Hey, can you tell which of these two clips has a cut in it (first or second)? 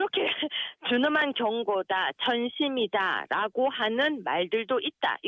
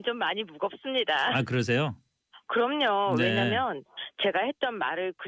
first